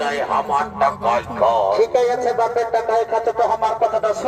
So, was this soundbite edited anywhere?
no; 0 cuts

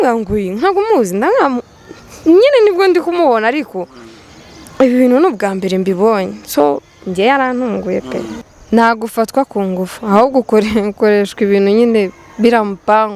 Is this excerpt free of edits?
no; 1 cut; at 8.4 s

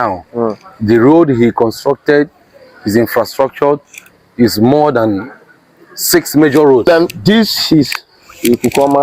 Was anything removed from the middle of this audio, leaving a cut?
yes; 1 cut; at 6.9 s

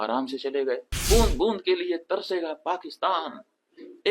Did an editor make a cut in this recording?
yes; 1 cut; at 0.9 s

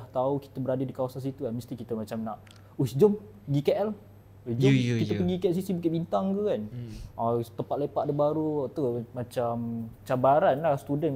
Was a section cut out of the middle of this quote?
no; 0 cuts

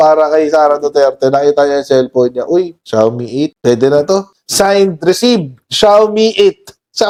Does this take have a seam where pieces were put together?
no; 0 cuts

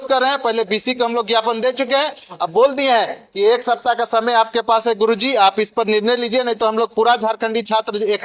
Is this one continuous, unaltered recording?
yes; 0 cuts

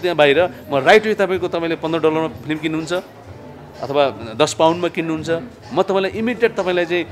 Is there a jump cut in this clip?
no; 0 cuts

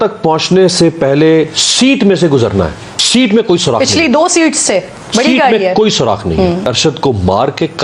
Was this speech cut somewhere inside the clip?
yes; 2 cuts; at 2.9 s, 6.7 s

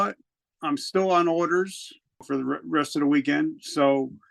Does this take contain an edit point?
yes; 1 cut; at 2.2 s

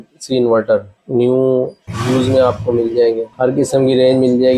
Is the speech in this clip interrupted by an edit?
yes; 3 cuts; at 1.0 s, 1.9 s, 3.3 s

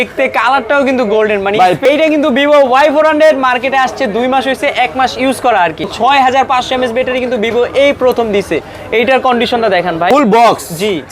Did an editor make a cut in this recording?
yes; 3 cuts; at 1.8 s, 5.9 s, 10.1 s

